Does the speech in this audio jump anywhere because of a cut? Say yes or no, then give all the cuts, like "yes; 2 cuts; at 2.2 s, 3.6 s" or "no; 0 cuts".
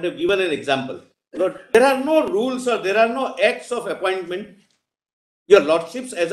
yes; 1 cut; at 1.7 s